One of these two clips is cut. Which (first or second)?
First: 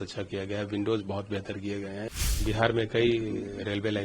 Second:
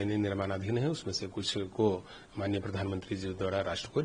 first